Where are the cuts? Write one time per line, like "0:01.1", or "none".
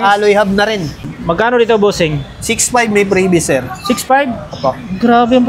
0:01.0